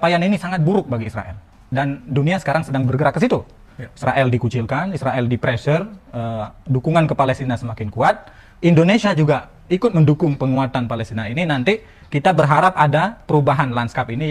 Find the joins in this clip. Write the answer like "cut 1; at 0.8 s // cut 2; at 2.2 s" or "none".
cut 1; at 1.6 s